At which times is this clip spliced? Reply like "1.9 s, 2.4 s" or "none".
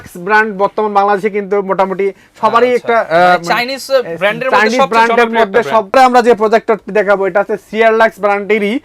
5.9 s